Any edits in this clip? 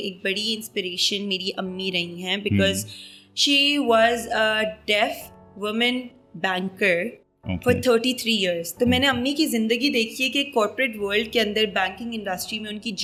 no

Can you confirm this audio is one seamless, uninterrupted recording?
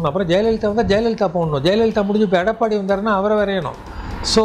yes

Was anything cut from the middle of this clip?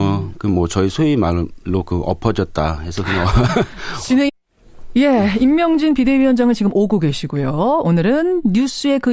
no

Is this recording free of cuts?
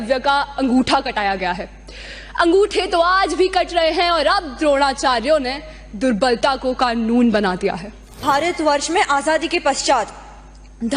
no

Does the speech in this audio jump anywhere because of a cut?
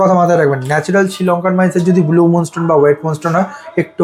no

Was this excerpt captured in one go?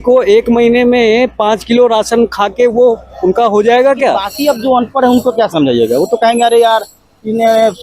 no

